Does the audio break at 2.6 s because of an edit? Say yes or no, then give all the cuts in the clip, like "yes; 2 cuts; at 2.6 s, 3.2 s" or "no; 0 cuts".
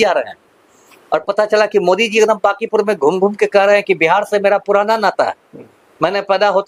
no; 0 cuts